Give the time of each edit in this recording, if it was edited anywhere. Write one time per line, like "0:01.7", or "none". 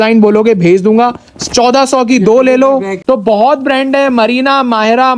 0:02.9